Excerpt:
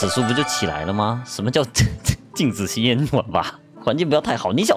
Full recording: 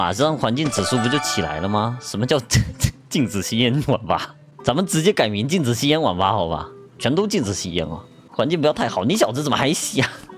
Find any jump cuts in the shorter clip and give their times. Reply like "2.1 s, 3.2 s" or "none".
3.6 s